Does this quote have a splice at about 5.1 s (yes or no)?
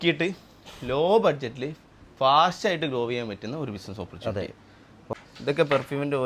yes